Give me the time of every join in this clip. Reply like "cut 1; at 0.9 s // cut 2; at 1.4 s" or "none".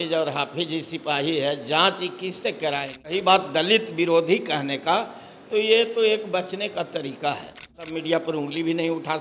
cut 1; at 3.1 s // cut 2; at 7.9 s